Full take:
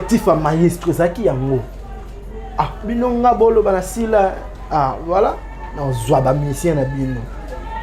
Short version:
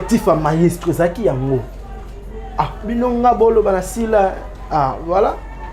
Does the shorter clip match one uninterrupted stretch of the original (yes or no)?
yes